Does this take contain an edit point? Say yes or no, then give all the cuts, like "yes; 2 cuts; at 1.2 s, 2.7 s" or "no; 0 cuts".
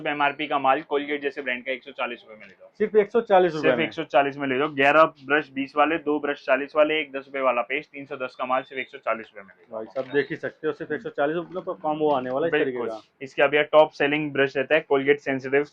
no; 0 cuts